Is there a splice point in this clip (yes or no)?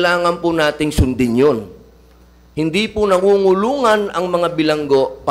no